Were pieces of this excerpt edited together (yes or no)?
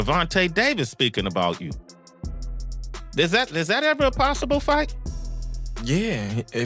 no